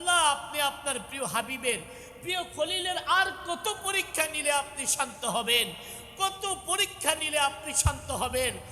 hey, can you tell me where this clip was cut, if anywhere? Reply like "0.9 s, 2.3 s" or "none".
none